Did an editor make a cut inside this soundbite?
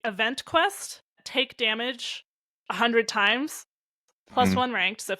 yes; 1 cut; at 1.2 s

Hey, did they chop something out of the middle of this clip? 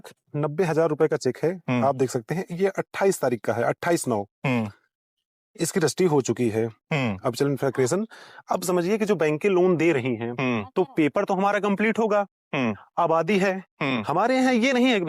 no; 0 cuts

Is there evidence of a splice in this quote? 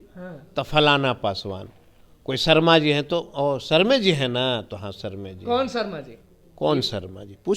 no; 0 cuts

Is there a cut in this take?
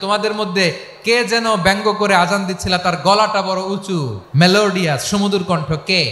yes; 1 cut; at 4.2 s

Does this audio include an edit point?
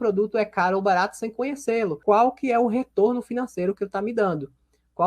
yes; 1 cut; at 2.0 s

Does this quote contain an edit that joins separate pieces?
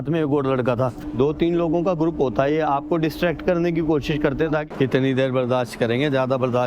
yes; 2 cuts; at 1.0 s, 4.6 s

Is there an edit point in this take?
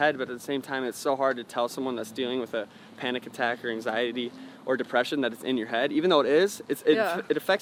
no; 0 cuts

